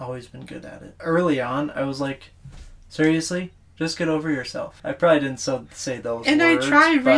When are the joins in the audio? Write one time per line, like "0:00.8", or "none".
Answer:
0:01.0
0:04.7